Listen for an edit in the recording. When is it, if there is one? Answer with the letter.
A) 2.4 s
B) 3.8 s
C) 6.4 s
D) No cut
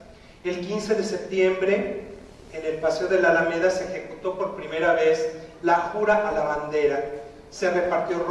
C